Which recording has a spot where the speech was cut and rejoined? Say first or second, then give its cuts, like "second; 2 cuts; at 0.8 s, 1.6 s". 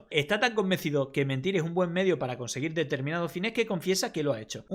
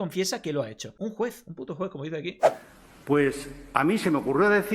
second; 1 cut; at 2.4 s